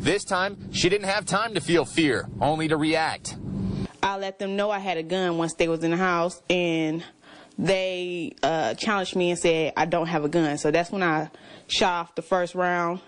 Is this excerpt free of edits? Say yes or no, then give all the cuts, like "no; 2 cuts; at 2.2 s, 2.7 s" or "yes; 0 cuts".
yes; 0 cuts